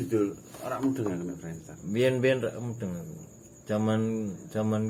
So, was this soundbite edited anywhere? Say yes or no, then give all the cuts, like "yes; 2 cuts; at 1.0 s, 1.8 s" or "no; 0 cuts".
no; 0 cuts